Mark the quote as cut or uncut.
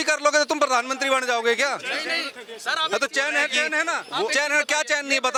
uncut